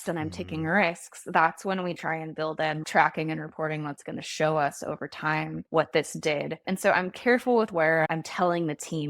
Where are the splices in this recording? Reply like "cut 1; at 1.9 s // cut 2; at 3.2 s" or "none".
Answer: cut 1; at 2.8 s // cut 2; at 5.6 s // cut 3; at 6.6 s // cut 4; at 8.1 s